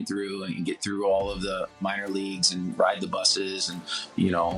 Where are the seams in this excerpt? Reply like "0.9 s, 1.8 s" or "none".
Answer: 1.8 s

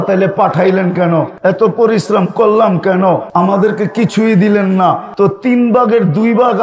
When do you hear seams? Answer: 1.3 s, 3.2 s, 5.1 s

